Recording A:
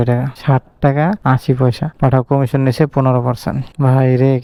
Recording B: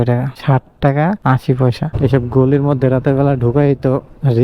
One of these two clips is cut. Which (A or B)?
B